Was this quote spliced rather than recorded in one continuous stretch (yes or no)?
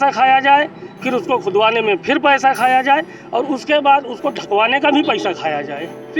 no